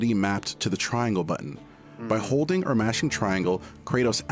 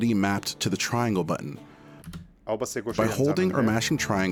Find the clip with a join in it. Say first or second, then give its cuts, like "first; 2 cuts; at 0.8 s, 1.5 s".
first; 1 cut; at 2.1 s